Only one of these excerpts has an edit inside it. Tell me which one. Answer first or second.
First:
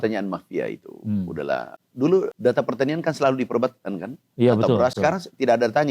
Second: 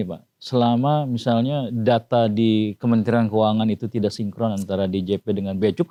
first